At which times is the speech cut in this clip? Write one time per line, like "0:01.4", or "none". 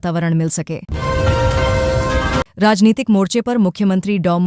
0:00.9
0:02.5